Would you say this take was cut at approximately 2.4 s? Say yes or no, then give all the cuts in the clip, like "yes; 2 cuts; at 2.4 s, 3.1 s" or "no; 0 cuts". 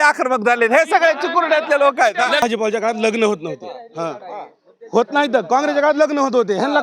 yes; 1 cut; at 2.4 s